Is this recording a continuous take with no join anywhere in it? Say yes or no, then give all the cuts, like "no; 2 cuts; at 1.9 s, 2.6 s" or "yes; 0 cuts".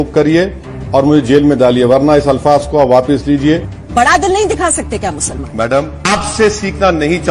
no; 2 cuts; at 3.7 s, 6.0 s